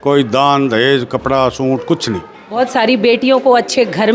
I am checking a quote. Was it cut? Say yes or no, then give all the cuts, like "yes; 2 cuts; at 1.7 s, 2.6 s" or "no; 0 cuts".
yes; 1 cut; at 2.4 s